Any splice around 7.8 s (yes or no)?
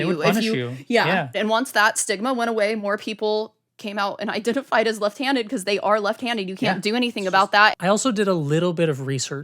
yes